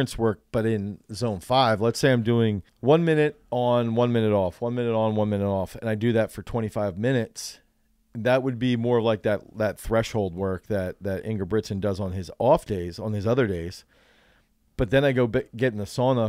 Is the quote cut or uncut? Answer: cut